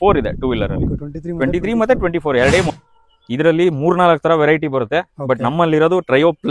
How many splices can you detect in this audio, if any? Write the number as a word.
one